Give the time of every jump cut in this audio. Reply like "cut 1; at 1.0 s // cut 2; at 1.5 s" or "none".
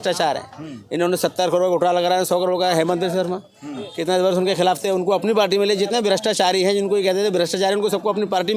none